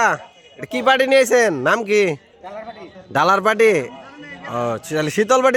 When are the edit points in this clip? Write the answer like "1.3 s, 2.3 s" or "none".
none